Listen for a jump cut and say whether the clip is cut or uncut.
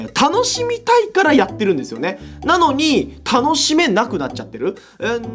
uncut